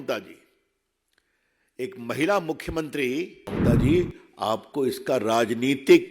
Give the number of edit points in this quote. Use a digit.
1